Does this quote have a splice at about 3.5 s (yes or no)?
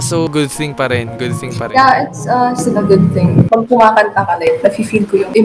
yes